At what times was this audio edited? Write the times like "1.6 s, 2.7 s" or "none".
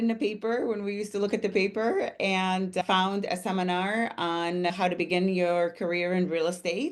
2.8 s, 4.7 s